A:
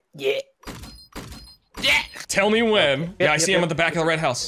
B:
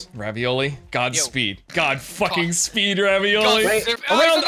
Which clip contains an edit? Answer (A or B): A